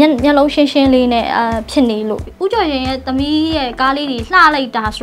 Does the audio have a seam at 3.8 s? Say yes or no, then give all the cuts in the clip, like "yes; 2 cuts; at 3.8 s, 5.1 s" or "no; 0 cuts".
no; 1 cut; at 2.2 s